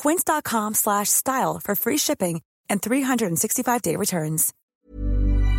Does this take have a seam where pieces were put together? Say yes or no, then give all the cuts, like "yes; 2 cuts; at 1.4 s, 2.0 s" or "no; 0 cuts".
yes; 1 cut; at 4.6 s